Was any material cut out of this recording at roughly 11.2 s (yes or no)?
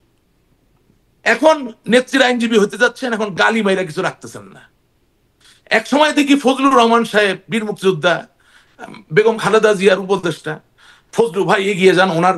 no